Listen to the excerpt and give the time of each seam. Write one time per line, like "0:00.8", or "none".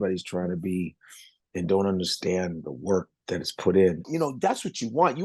0:04.1